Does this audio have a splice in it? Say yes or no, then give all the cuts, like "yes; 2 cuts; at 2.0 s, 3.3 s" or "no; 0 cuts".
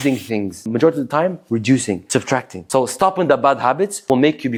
no; 0 cuts